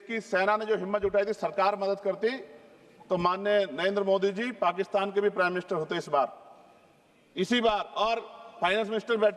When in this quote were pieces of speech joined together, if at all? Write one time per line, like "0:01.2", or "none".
none